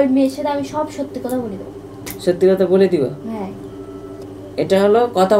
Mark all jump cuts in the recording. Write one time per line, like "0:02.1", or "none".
0:04.2